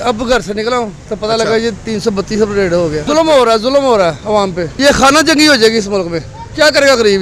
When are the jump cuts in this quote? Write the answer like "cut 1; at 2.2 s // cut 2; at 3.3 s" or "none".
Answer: none